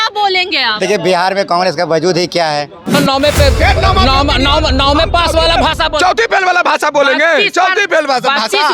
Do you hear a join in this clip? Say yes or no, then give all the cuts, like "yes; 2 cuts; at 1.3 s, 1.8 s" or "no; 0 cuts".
yes; 1 cut; at 3.0 s